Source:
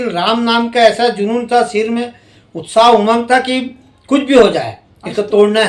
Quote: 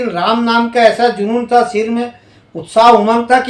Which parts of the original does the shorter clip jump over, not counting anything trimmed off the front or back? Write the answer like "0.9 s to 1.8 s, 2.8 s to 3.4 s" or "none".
none